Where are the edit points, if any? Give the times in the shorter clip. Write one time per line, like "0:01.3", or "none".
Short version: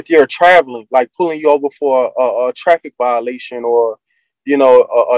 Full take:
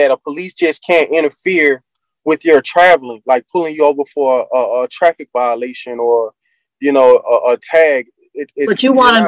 none